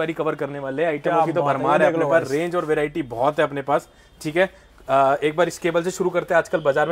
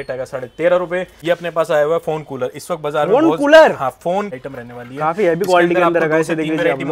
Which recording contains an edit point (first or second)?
second